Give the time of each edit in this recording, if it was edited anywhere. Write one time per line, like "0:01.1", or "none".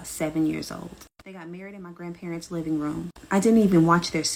none